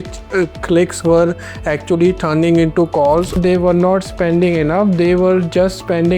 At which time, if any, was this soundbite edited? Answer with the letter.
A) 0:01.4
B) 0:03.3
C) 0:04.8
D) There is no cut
B